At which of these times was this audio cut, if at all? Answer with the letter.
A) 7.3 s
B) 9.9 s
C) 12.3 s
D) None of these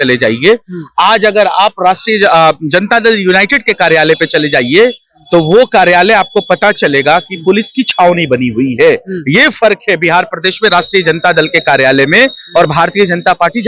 D